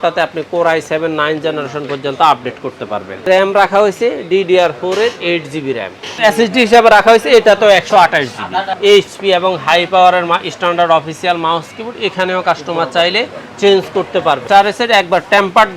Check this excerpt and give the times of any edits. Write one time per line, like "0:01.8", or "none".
0:03.3
0:06.2
0:08.7
0:14.4